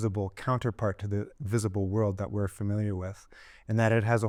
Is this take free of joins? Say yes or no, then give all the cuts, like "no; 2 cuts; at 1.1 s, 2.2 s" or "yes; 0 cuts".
yes; 0 cuts